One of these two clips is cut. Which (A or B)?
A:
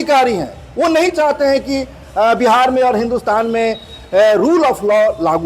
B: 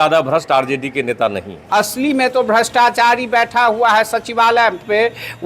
B